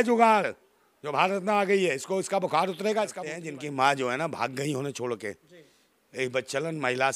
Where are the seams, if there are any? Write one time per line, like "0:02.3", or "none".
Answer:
0:03.4